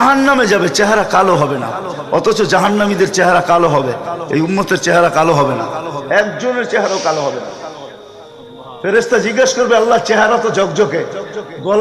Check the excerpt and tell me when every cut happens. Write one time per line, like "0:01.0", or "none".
none

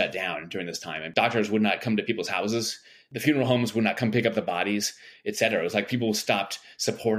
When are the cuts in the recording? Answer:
0:01.1

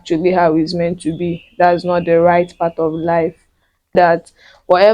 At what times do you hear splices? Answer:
0:03.9

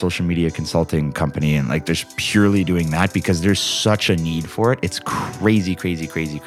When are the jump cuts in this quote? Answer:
none

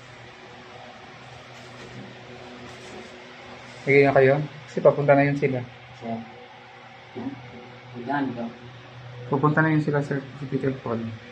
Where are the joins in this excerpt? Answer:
none

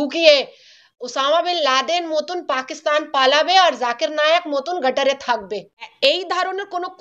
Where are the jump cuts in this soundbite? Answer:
0:05.8

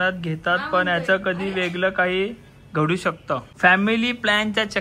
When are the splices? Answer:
0:03.5

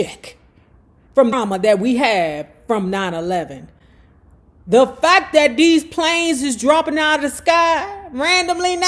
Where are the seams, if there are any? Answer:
0:01.3

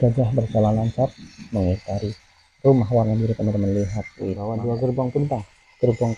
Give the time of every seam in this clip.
0:04.4

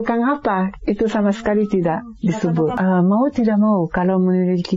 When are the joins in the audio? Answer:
0:02.7

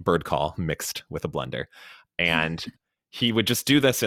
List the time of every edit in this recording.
none

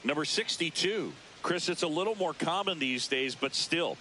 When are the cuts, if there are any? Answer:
0:01.2

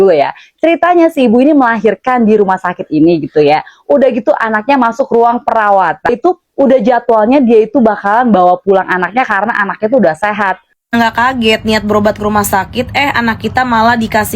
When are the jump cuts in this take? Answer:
0:10.8

